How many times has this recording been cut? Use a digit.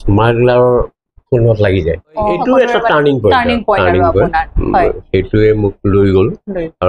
1